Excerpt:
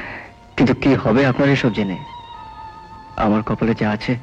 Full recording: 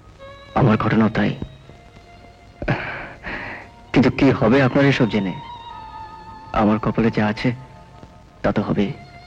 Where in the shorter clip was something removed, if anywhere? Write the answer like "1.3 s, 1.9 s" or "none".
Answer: none